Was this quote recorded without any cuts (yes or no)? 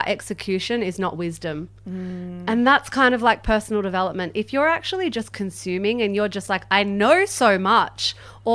yes